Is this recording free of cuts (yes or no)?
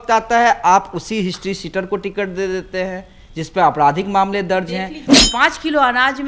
no